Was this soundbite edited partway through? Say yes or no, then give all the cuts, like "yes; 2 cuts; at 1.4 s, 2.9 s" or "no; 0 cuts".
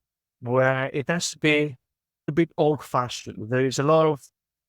yes; 1 cut; at 2.3 s